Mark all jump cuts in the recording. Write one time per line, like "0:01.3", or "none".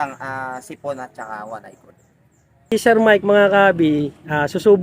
0:02.7